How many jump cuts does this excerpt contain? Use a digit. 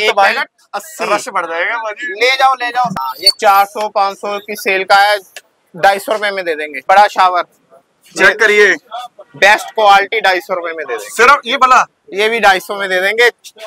2